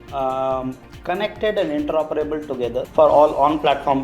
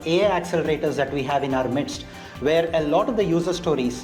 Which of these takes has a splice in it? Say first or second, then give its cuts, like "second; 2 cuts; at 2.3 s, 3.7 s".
first; 1 cut; at 2.8 s